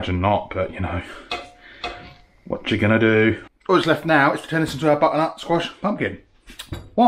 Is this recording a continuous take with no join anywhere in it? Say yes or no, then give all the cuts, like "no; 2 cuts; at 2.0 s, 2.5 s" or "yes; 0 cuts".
no; 1 cut; at 3.4 s